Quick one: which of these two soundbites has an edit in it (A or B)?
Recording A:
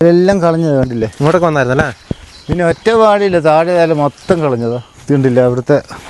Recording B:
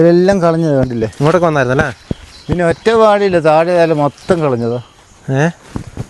A